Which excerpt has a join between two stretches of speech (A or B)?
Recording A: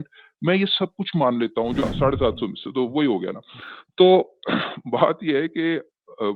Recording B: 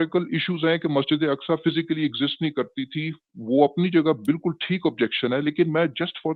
A